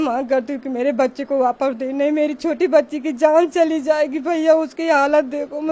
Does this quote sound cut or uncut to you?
uncut